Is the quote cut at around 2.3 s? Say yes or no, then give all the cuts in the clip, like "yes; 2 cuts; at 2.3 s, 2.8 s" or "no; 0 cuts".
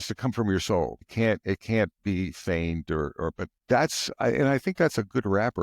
no; 2 cuts; at 1.1 s, 3.5 s